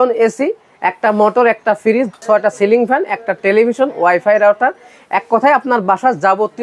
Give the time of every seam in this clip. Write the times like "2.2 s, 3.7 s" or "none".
2.2 s